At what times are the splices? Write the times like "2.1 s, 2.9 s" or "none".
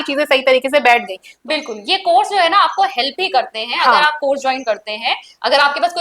1.4 s